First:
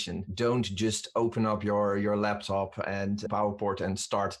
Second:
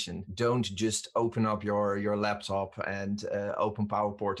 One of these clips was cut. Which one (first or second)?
first